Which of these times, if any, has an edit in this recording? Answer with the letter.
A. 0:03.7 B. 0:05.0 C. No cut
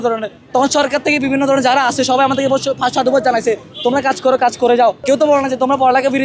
B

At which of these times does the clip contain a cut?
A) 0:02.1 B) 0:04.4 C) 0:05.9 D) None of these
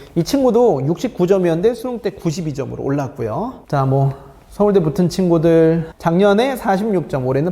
C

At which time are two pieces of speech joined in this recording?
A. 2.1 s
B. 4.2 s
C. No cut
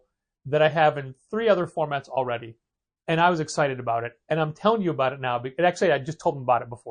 C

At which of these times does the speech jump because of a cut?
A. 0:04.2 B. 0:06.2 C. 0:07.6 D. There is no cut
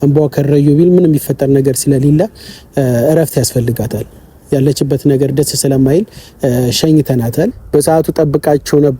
C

